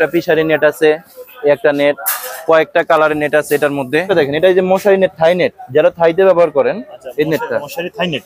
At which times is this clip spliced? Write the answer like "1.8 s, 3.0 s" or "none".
4.1 s